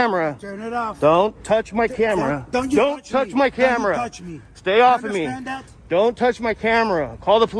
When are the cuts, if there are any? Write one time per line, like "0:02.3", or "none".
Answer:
none